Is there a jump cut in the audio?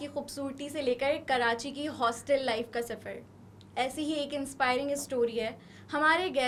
no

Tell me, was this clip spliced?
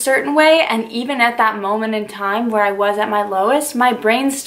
no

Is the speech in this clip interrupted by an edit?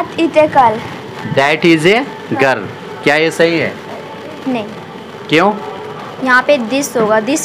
yes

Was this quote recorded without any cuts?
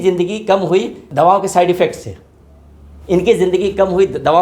no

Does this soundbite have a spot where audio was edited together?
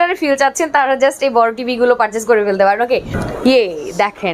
yes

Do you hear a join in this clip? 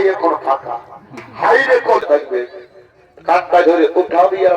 yes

